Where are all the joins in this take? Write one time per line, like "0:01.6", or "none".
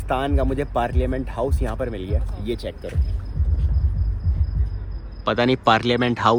none

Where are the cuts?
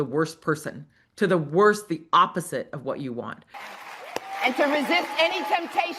0:03.6

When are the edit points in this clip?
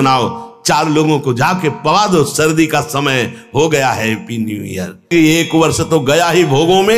0:05.1

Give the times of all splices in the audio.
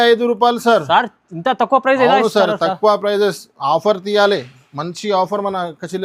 none

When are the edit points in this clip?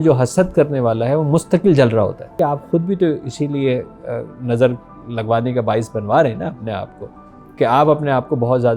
0:02.3

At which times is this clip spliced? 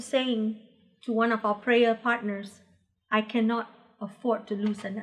none

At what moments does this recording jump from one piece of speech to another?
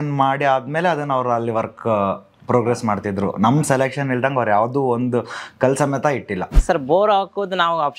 0:06.6

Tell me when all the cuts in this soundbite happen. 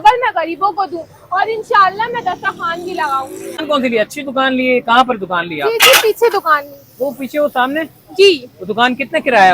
0:03.6

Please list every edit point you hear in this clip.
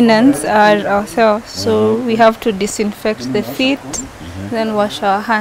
none

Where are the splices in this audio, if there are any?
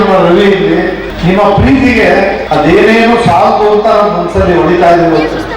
0:01.1
0:02.4

